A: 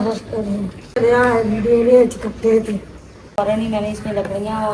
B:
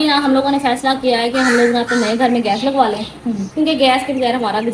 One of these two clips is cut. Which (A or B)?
A